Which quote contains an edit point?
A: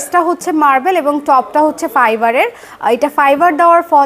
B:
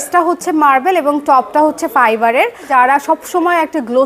B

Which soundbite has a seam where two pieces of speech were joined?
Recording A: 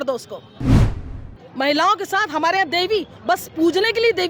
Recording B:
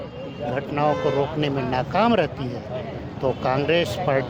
A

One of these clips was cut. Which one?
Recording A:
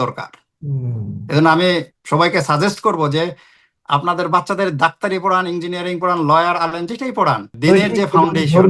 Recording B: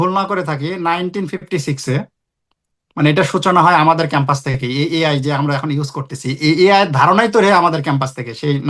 A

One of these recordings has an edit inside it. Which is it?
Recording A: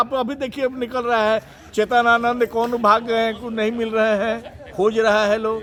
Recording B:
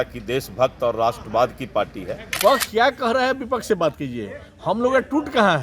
B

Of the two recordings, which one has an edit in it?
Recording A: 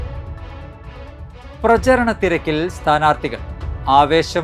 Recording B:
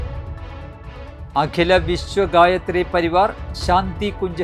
A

